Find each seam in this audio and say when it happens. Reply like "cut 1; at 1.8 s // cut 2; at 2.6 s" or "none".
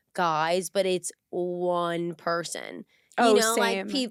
none